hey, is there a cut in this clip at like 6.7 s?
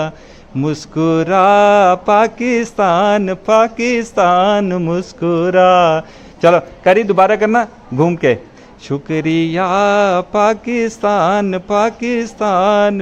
no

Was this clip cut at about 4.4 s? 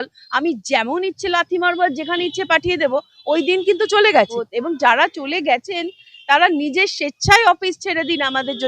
yes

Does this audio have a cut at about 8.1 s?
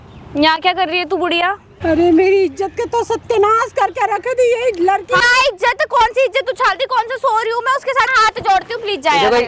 yes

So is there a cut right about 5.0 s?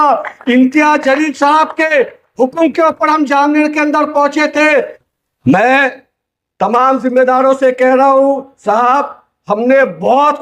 yes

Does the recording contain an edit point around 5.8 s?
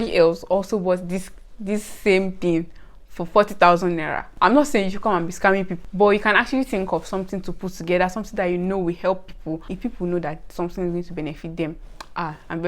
yes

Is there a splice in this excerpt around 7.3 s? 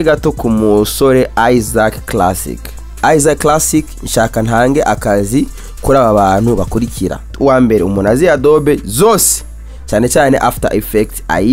yes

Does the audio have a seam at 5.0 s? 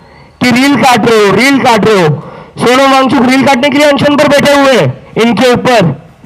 yes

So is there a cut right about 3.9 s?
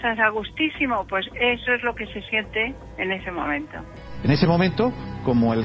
yes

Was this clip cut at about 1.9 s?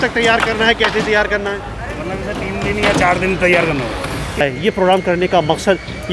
no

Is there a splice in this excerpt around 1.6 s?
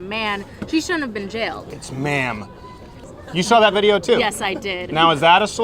yes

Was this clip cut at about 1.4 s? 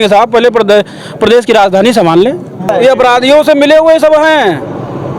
no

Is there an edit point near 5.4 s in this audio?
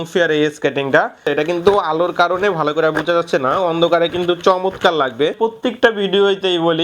yes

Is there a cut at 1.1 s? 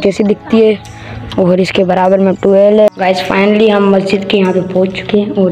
no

